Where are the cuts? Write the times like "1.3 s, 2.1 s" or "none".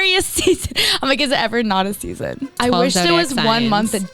2.6 s

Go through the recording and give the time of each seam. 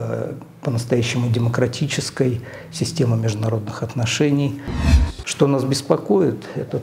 4.8 s

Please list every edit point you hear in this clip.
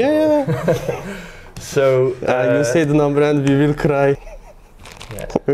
4.3 s

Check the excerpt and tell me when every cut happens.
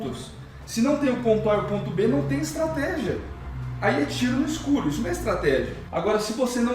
5.8 s

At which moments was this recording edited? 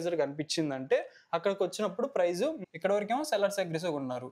2.6 s

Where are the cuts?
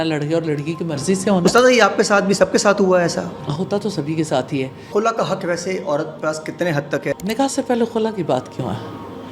3.4 s, 4.9 s, 7.1 s

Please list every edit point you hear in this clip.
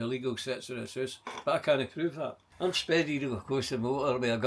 2.4 s

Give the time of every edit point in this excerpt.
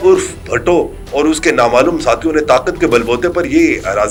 none

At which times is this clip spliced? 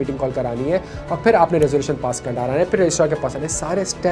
none

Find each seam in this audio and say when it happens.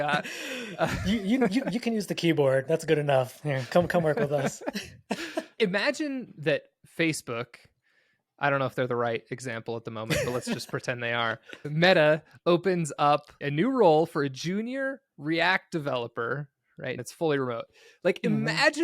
5.4 s, 13.3 s, 17.0 s

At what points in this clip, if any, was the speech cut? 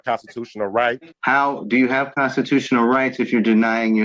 1.1 s

